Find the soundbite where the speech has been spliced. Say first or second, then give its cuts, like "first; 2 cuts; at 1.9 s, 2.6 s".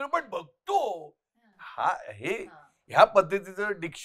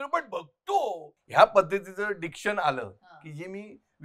second; 1 cut; at 1.1 s